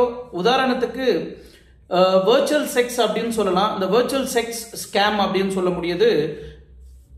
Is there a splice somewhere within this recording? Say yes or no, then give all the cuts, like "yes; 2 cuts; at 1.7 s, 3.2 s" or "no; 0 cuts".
no; 0 cuts